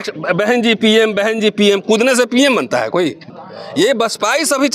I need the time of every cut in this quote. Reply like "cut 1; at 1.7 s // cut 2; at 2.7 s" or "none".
cut 1; at 3.2 s